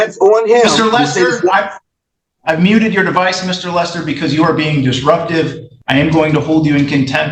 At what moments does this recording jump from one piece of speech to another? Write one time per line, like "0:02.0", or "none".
0:05.7